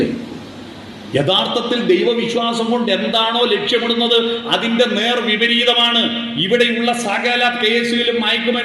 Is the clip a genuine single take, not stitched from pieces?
yes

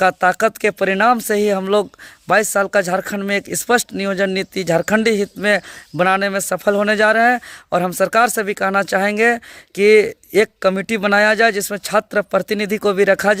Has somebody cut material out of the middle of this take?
no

